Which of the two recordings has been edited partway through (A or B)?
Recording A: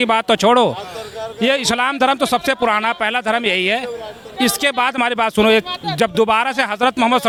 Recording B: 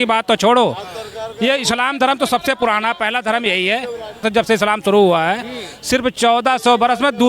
B